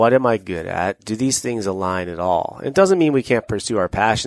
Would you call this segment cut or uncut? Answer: uncut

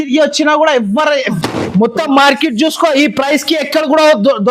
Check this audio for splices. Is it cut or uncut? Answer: cut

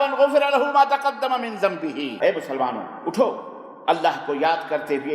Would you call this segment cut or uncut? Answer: cut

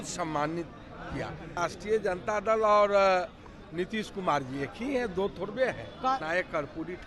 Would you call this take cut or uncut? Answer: cut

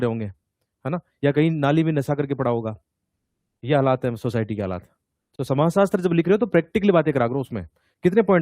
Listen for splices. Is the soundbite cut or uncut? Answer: uncut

